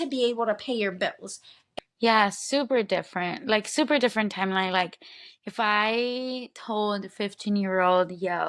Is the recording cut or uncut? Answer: cut